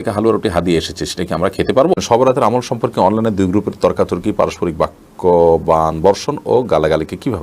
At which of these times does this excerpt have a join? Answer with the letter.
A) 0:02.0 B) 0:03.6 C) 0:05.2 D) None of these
A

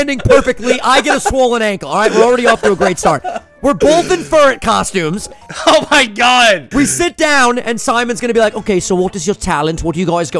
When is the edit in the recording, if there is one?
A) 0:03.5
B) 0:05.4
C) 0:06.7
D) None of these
C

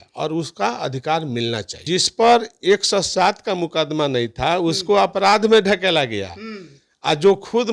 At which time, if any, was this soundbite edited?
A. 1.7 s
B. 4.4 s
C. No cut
A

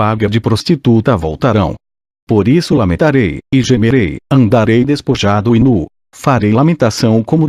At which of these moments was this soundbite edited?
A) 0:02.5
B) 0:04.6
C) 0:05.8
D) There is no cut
D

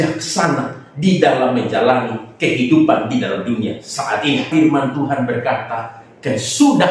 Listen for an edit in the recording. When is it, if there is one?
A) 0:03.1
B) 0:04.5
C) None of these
B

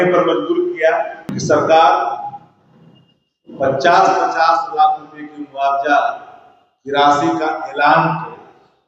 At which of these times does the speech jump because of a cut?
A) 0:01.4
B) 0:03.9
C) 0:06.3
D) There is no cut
A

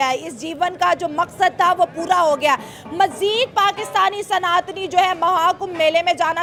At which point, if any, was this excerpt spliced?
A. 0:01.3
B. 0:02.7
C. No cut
C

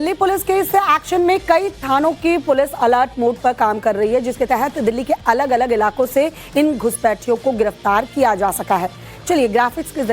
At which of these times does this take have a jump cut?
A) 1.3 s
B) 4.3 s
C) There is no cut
A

